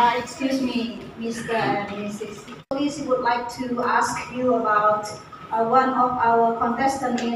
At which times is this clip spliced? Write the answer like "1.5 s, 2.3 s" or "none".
2.6 s